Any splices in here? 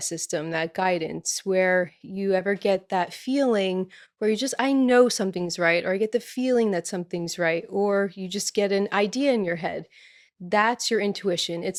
no; 0 cuts

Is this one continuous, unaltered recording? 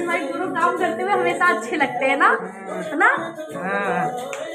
yes; 0 cuts

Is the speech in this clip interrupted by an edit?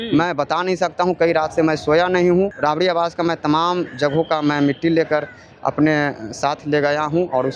yes; 1 cut; at 2.6 s

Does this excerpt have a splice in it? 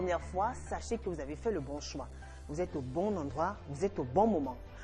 no; 0 cuts

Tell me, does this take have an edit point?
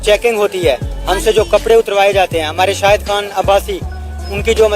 no; 0 cuts

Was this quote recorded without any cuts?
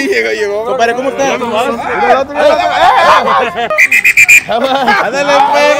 no; 1 cut; at 3.7 s

